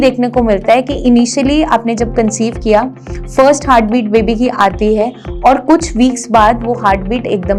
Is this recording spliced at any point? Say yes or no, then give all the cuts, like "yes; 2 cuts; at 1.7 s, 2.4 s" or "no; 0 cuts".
no; 0 cuts